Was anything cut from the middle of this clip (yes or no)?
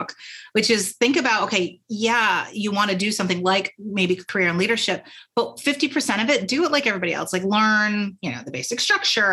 yes